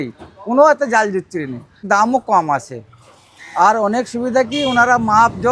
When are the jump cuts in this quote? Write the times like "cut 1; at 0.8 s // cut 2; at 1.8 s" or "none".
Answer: cut 1; at 1.8 s